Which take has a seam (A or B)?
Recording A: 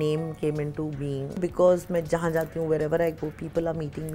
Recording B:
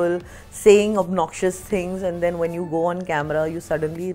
A